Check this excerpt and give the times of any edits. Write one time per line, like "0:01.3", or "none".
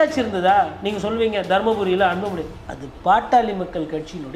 none